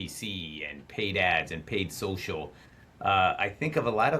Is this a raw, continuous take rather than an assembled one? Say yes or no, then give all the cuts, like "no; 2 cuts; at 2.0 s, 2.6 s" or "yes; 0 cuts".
yes; 0 cuts